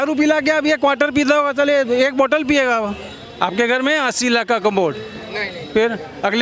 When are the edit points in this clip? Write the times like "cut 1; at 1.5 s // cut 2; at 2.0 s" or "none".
cut 1; at 3.1 s